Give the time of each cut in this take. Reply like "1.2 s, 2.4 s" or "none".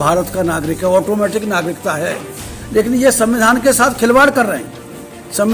none